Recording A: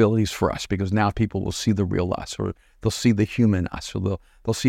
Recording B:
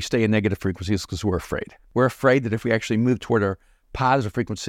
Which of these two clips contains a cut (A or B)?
B